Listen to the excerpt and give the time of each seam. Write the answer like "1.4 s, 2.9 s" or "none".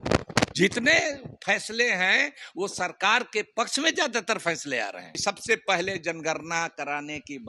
5.2 s